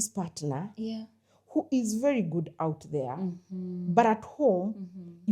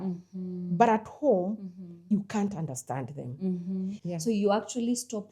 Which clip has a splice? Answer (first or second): second